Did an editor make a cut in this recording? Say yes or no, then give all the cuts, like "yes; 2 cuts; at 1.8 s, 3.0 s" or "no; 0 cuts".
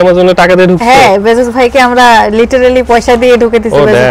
no; 0 cuts